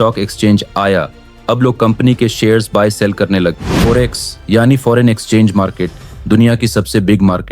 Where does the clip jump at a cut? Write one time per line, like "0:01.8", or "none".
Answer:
0:03.7

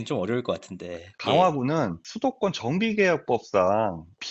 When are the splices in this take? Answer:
0:01.1

